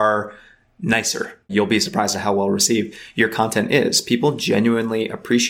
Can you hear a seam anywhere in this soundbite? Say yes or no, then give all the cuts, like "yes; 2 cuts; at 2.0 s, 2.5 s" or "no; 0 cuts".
yes; 1 cut; at 1.5 s